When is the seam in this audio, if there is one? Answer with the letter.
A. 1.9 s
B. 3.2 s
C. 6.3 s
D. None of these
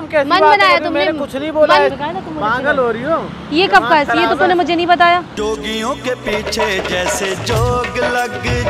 A